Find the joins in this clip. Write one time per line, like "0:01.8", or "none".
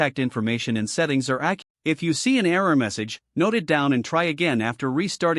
0:01.6